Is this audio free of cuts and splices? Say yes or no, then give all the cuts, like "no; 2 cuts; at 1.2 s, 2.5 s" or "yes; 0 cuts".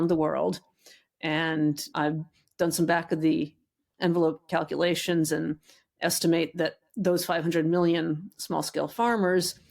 no; 1 cut; at 1.8 s